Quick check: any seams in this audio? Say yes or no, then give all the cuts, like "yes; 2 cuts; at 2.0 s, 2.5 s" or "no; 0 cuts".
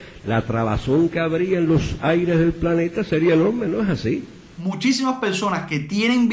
yes; 1 cut; at 4.5 s